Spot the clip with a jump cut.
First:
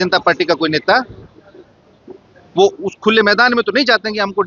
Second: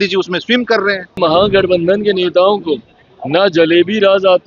second; 1 cut; at 1.2 s

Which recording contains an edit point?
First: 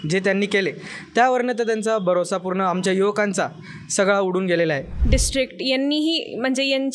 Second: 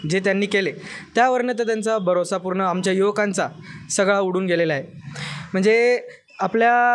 first; 1 cut; at 4.9 s

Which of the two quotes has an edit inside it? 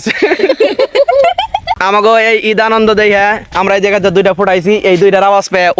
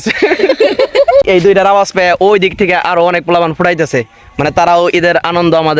second; 1 cut; at 1.2 s

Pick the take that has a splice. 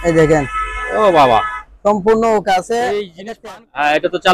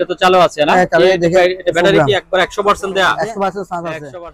first; 1 cut; at 3.1 s

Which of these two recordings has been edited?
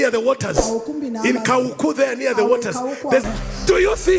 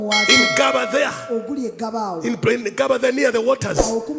first; 1 cut; at 3.2 s

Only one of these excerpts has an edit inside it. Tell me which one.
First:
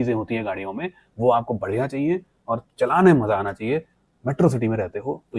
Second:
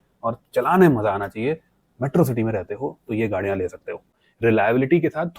second; 1 cut; at 4.1 s

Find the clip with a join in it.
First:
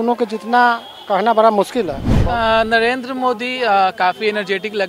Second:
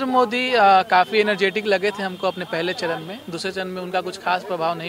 first; 1 cut; at 2.0 s

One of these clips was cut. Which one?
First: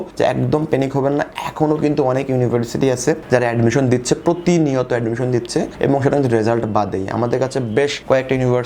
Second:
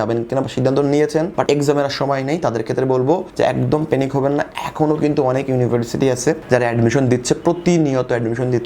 second; 1 cut; at 1.4 s

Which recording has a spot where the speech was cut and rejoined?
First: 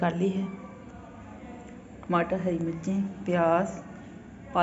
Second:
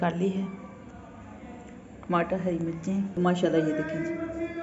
second; 1 cut; at 3.2 s

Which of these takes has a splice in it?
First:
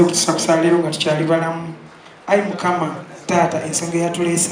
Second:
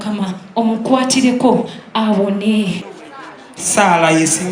second; 1 cut; at 2.8 s

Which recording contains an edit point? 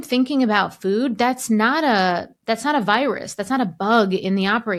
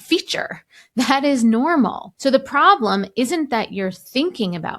second; 1 cut; at 2.1 s

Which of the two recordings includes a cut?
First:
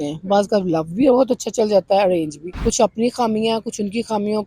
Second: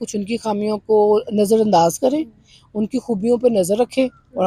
first; 1 cut; at 2.4 s

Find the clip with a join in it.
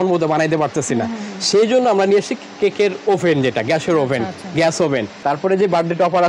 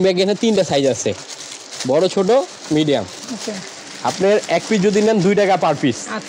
first; 1 cut; at 5.1 s

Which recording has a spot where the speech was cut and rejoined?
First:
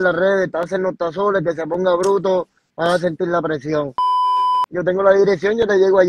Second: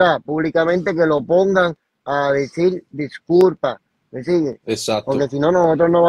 first; 1 cut; at 4.2 s

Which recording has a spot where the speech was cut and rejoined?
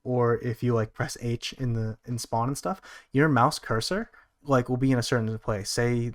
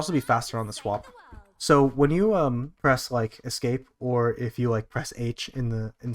second; 1 cut; at 2.7 s

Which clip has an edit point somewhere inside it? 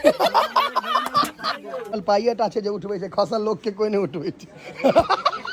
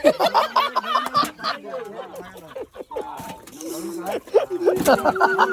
first; 1 cut; at 1.9 s

